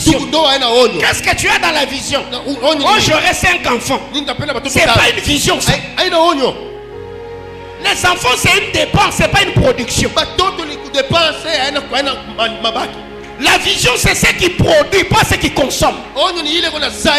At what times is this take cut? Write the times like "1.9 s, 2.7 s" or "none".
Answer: none